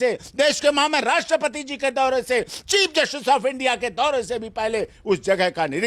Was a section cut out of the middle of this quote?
no; 0 cuts

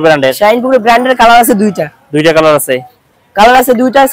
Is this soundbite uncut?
yes; 0 cuts

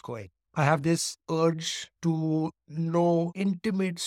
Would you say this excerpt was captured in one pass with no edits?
yes; 0 cuts

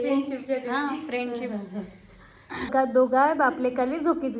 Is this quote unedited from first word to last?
no; 1 cut; at 2.7 s

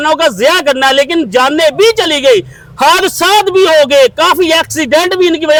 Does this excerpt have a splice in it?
no; 0 cuts

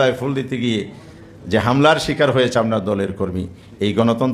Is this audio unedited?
yes; 0 cuts

